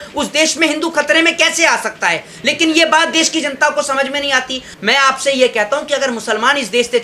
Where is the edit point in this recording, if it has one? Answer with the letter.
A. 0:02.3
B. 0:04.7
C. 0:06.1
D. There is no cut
B